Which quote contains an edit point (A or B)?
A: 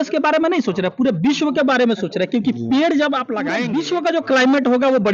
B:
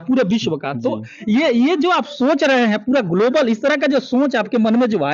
A